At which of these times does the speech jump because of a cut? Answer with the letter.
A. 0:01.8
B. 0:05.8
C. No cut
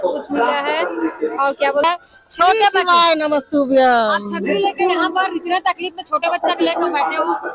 A